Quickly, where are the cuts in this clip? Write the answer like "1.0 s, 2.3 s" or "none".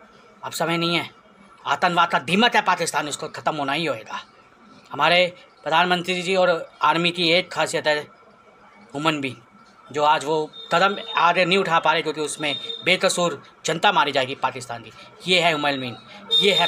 none